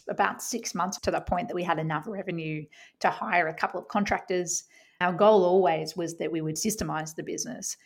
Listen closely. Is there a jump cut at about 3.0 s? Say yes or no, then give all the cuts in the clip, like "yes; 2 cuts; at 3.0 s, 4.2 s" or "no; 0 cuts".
no; 2 cuts; at 0.9 s, 5.0 s